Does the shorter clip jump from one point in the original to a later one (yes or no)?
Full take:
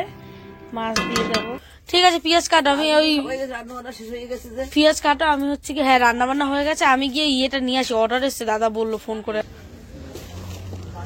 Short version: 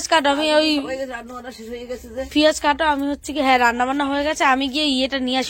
no